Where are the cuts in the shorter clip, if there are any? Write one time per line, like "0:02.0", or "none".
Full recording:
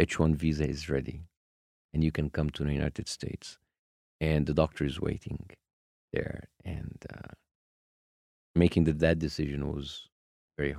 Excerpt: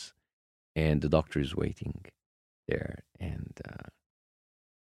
none